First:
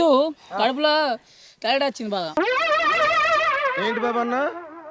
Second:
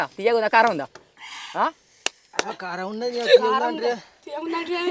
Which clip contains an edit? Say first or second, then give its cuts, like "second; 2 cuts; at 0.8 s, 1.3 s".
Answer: first; 1 cut; at 2.3 s